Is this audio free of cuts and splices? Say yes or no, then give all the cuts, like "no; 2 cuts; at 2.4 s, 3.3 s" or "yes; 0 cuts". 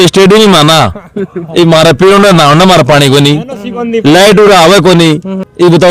yes; 0 cuts